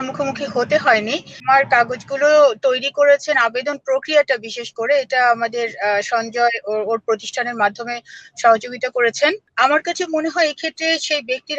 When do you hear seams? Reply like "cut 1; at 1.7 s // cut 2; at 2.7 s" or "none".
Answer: cut 1; at 1.3 s // cut 2; at 9.4 s

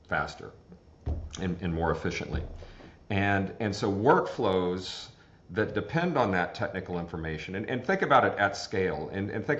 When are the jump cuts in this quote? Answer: none

